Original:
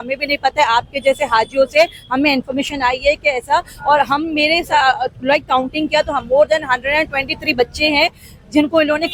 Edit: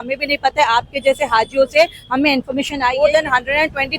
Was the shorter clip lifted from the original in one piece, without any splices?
no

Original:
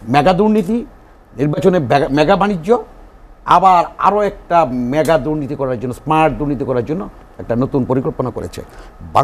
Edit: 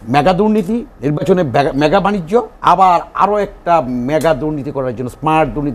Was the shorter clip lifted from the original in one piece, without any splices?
no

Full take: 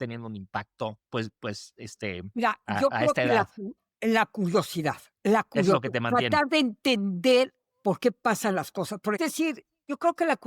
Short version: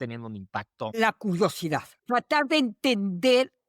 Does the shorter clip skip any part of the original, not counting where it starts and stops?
yes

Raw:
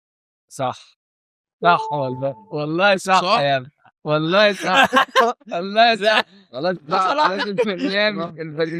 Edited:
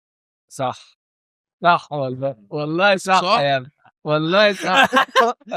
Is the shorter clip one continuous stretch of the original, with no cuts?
yes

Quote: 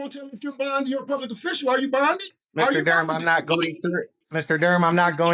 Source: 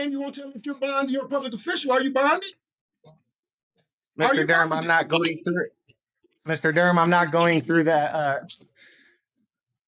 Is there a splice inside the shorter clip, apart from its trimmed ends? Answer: yes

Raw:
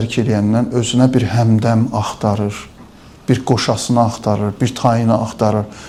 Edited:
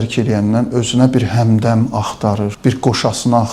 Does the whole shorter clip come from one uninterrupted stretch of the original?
no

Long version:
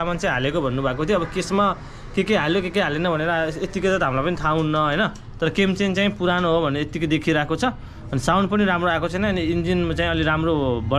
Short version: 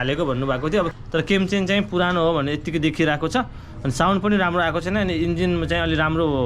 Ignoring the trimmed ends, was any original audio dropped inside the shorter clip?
yes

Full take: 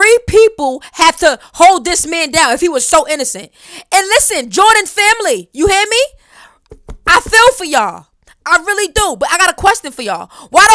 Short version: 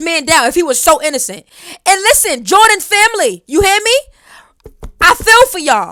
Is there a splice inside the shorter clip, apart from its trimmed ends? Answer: no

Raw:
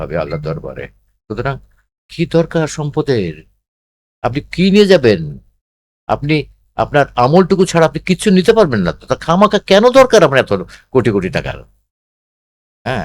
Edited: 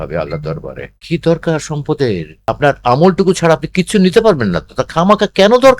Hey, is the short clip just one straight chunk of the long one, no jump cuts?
no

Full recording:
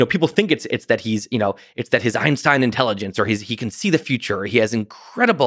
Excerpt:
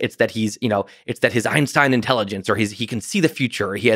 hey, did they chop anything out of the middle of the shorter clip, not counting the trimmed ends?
no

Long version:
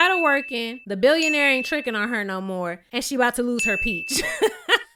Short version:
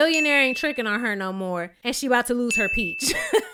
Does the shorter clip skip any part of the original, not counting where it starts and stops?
no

